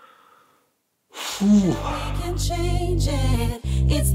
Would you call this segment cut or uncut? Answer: cut